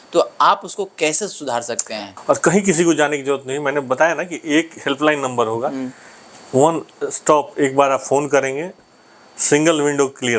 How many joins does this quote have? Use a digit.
1